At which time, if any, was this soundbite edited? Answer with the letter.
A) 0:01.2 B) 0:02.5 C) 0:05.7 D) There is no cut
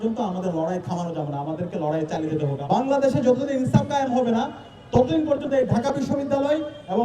B